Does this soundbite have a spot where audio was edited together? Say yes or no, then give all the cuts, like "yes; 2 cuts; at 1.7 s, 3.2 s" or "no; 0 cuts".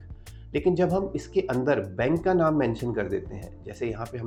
no; 0 cuts